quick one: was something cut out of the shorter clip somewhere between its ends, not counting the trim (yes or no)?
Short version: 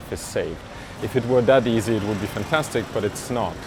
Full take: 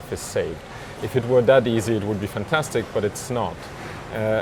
no